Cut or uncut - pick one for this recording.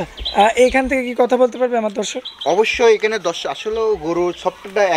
uncut